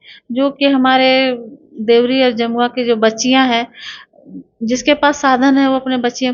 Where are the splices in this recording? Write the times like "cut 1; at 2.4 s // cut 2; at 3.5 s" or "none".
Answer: none